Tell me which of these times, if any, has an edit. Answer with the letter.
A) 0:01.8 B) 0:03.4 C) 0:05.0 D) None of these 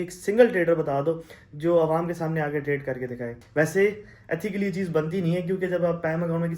B